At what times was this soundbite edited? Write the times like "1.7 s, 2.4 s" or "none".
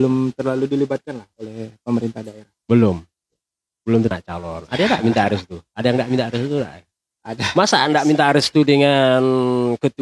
4.1 s